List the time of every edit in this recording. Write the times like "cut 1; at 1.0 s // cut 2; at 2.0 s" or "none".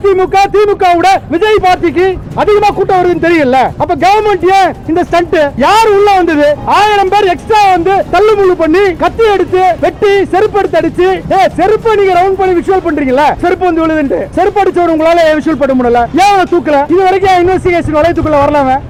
none